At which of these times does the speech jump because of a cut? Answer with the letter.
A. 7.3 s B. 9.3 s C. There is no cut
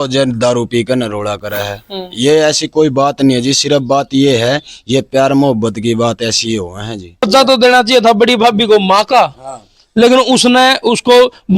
A